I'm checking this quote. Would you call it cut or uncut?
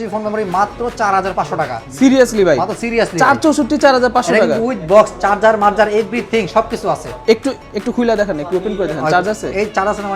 uncut